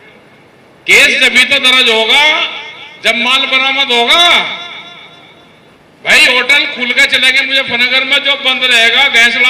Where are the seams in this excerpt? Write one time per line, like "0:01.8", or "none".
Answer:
0:05.7